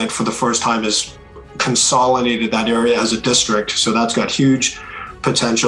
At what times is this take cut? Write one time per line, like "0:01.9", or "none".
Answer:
none